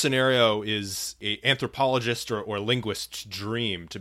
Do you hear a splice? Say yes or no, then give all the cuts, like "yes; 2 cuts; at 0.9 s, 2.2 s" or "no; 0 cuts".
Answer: yes; 1 cut; at 1.2 s